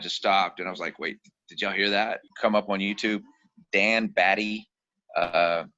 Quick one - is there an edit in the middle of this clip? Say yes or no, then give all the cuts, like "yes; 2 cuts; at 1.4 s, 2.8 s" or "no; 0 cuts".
yes; 1 cut; at 2.3 s